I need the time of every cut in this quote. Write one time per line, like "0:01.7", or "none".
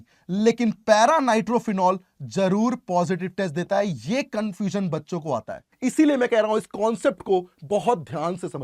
0:05.7